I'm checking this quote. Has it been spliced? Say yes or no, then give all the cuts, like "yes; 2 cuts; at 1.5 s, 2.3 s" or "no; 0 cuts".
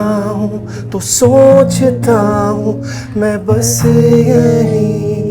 no; 0 cuts